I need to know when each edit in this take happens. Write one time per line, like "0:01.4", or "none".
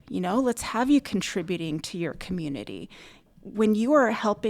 0:03.3